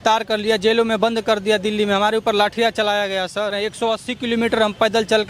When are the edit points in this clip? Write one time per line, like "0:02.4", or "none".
0:03.5